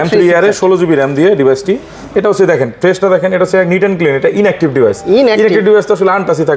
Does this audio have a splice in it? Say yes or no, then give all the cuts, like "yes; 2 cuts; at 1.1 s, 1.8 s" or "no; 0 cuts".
no; 0 cuts